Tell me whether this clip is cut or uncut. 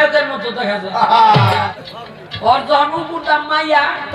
cut